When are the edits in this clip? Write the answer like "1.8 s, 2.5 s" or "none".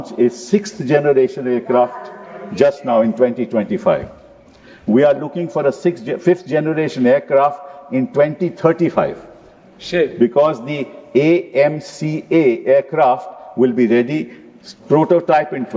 none

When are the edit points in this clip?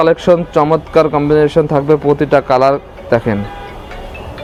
none

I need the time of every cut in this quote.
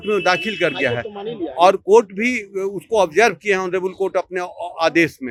none

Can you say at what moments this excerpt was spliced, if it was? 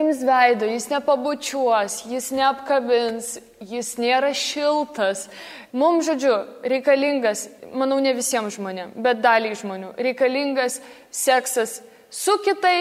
5.5 s, 7.5 s

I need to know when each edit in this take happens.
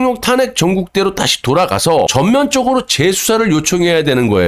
2.1 s

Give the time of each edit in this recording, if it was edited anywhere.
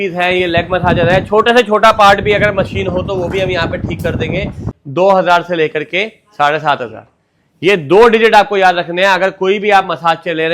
4.7 s

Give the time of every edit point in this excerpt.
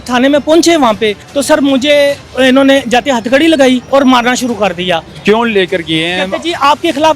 1.3 s, 3.8 s, 5.1 s

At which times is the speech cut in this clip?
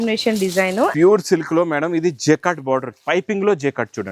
0.9 s

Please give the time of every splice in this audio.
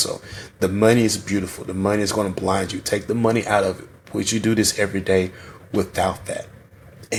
none

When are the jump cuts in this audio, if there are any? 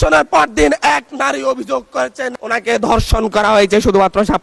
none

